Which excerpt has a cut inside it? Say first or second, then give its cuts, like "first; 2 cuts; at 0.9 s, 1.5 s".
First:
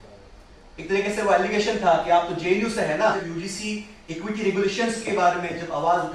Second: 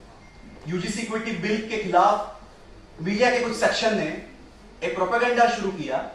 first; 1 cut; at 3.2 s